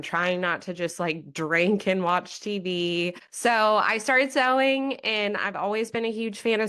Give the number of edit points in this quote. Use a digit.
1